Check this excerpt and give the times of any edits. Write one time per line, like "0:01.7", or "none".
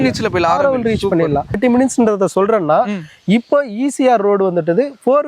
0:01.6